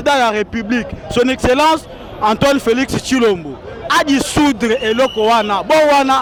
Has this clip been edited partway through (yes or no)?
no